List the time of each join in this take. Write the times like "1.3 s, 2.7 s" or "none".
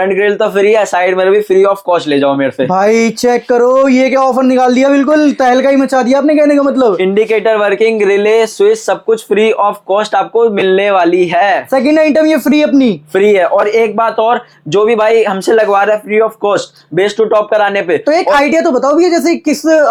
none